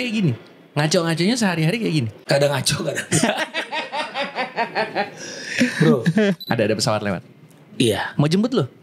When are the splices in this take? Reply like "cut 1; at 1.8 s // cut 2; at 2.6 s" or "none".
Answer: cut 1; at 2.1 s // cut 2; at 6.4 s